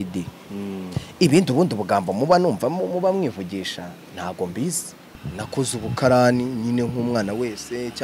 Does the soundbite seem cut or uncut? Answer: cut